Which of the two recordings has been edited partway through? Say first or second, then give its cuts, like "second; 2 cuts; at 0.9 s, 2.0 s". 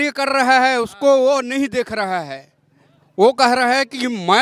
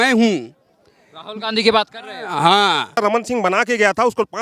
second; 1 cut; at 3.0 s